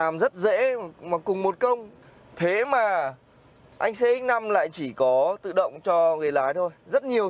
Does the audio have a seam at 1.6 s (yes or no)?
yes